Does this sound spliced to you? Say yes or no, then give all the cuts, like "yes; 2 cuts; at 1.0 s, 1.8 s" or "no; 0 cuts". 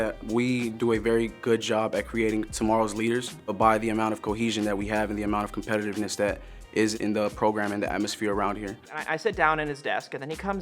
yes; 3 cuts; at 3.5 s, 6.9 s, 9.0 s